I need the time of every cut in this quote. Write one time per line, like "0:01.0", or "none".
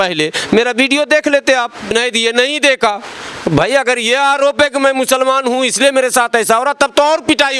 0:01.9